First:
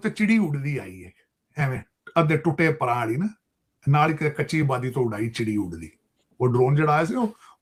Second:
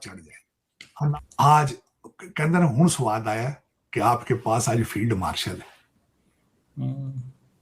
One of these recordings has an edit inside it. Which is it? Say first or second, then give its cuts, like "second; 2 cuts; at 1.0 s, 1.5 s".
second; 1 cut; at 1.1 s